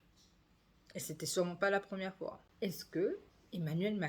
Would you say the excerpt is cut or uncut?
cut